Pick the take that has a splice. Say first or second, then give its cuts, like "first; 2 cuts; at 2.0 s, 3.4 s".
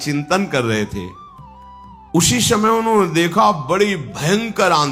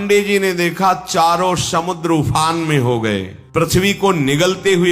second; 1 cut; at 3.4 s